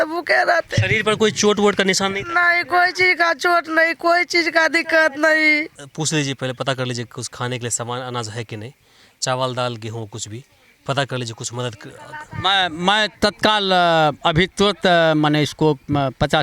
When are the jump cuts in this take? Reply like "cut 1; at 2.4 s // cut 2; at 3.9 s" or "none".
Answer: cut 1; at 5.8 s